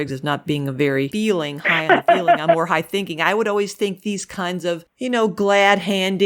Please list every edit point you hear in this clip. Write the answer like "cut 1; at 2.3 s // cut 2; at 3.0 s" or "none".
cut 1; at 1.1 s // cut 2; at 4.9 s